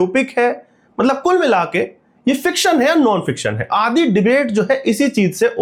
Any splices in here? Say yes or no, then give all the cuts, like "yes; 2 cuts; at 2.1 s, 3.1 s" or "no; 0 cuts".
no; 0 cuts